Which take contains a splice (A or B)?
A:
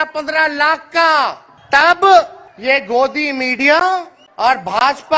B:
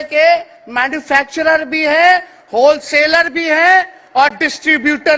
A